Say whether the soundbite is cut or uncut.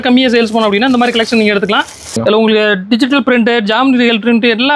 cut